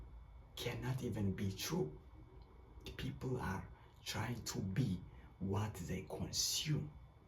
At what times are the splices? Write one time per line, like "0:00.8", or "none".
0:02.9